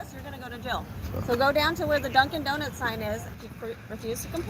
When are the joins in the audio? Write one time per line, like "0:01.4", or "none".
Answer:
0:03.3